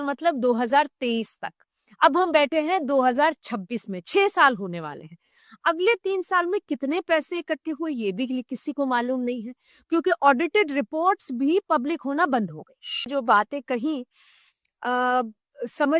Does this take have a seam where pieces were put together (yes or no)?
yes